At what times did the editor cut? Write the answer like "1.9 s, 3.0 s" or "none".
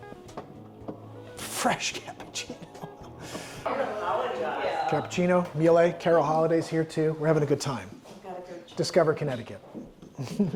3.6 s